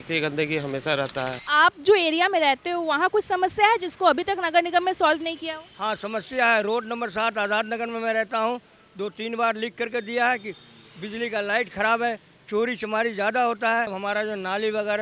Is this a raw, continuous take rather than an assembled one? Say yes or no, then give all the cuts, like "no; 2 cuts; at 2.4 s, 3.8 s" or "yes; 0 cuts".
no; 2 cuts; at 1.4 s, 13.9 s